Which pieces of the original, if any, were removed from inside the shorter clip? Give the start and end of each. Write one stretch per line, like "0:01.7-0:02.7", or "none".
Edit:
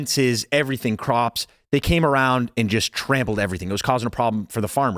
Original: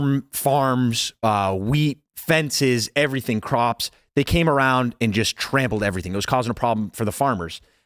none